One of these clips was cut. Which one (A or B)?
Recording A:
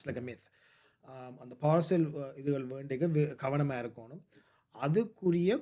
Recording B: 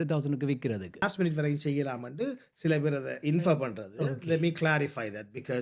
B